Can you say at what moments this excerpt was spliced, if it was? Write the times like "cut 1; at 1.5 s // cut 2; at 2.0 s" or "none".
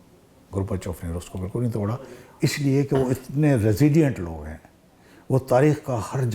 cut 1; at 2.2 s